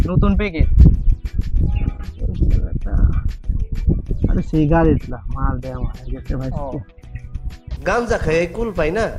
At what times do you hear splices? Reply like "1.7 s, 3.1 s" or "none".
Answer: none